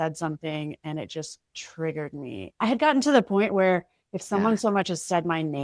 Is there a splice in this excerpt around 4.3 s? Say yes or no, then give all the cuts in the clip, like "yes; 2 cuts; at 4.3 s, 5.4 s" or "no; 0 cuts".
no; 1 cut; at 2.5 s